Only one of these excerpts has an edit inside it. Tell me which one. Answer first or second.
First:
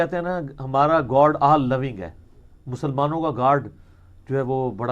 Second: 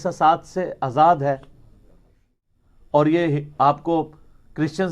second